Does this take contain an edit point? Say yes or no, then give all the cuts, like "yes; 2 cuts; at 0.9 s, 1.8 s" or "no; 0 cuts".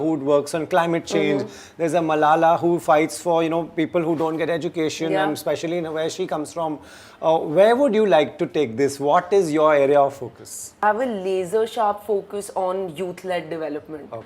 yes; 1 cut; at 10.8 s